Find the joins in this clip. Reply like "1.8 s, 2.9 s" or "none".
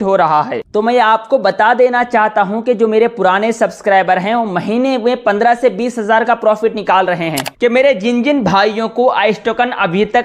7.4 s